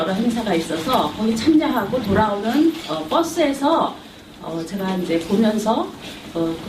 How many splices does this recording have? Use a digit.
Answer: 1